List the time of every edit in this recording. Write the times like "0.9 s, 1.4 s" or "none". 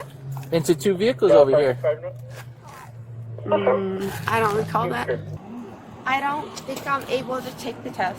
5.3 s